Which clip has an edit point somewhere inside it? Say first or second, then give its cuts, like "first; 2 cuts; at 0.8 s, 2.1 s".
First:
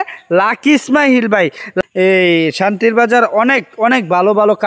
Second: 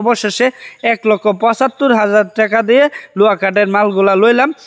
first; 1 cut; at 1.8 s